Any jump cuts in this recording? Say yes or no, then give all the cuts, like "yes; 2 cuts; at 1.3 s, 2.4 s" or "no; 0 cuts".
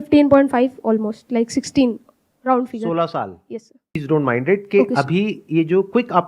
yes; 1 cut; at 4.0 s